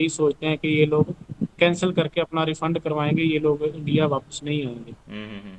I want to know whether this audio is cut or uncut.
uncut